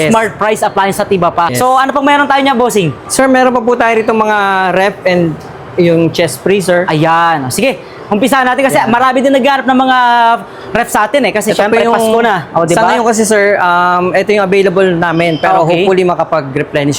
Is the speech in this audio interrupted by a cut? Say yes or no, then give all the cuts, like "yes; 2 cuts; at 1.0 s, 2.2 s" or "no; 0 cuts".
no; 0 cuts